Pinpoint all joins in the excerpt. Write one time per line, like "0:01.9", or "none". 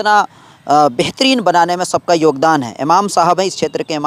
none